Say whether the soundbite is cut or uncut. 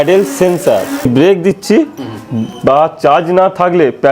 cut